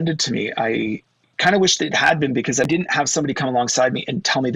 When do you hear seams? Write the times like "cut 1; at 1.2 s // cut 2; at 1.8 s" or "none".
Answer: cut 1; at 2.7 s

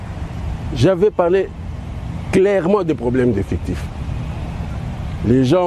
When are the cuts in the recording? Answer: none

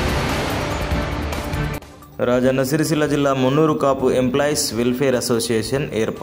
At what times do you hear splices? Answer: cut 1; at 1.3 s

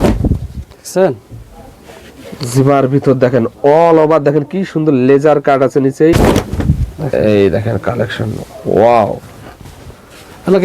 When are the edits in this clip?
cut 1; at 6.2 s

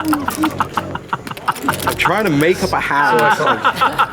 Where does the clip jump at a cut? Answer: none

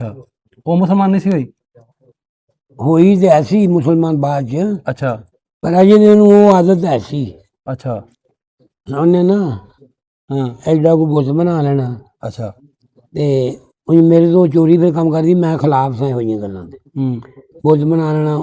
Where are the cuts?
none

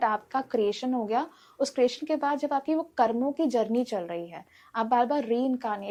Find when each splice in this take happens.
none

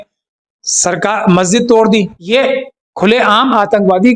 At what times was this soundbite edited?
cut 1; at 2.2 s

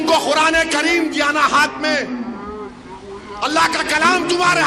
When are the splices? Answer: none

